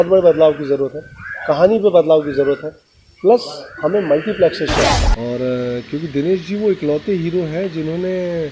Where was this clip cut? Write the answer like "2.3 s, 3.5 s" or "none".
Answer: 5.1 s